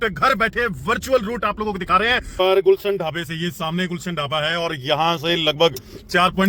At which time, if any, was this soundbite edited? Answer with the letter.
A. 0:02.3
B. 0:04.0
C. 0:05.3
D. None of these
A